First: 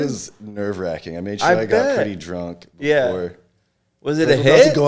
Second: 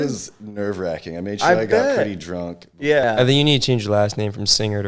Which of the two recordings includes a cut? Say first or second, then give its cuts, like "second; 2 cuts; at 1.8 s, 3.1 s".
second; 1 cut; at 3.0 s